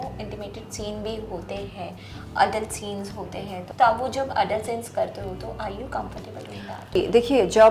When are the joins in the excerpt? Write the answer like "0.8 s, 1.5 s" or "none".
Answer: 3.6 s, 7.0 s